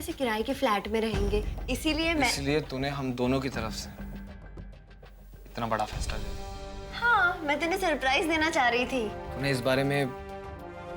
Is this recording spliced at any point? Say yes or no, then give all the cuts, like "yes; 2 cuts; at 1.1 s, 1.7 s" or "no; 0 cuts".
yes; 1 cut; at 9.2 s